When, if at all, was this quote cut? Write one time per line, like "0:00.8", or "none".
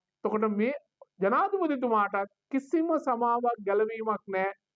none